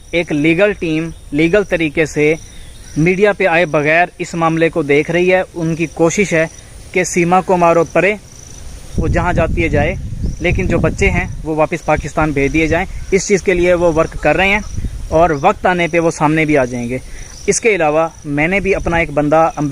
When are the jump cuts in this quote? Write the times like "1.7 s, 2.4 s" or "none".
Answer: none